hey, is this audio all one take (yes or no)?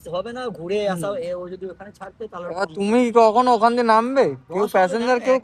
yes